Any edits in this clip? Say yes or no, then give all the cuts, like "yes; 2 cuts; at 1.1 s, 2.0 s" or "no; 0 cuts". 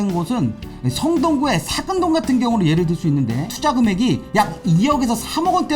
yes; 1 cut; at 3.5 s